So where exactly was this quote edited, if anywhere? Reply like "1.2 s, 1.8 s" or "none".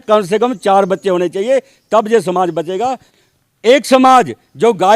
3.1 s

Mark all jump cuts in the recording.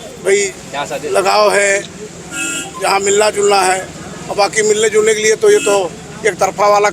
none

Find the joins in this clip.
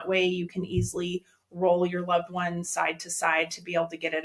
none

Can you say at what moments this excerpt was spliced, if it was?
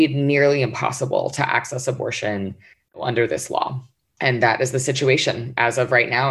none

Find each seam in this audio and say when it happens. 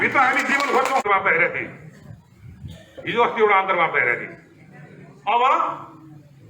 1.0 s

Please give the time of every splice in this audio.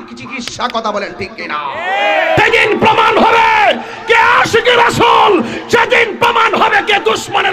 2.4 s

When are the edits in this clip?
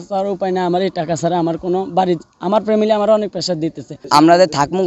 3.9 s

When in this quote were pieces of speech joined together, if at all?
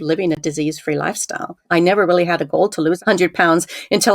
1.7 s, 3.0 s

